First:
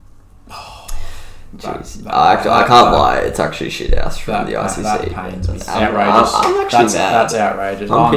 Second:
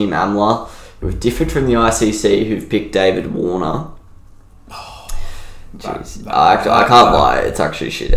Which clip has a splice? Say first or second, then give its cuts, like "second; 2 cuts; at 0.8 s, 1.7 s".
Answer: first; 1 cut; at 5.5 s